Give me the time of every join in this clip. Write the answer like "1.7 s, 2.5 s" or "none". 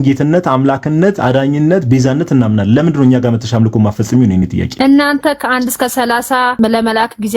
4.7 s, 6.5 s